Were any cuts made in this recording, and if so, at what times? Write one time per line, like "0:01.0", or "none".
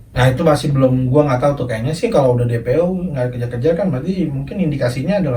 none